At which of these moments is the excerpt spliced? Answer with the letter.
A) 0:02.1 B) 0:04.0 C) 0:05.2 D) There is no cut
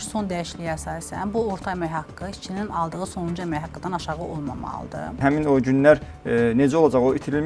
C